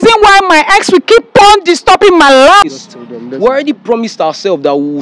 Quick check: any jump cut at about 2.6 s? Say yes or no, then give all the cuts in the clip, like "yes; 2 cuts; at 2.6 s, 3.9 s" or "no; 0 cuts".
yes; 1 cut; at 2.6 s